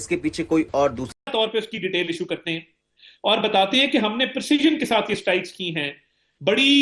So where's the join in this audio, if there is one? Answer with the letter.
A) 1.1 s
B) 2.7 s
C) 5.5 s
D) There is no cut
A